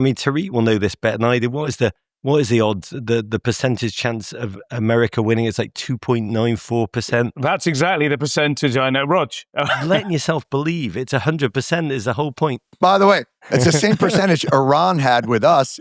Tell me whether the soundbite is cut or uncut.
uncut